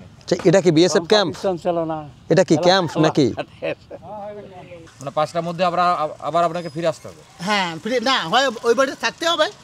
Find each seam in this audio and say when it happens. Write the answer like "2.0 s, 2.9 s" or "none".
4.8 s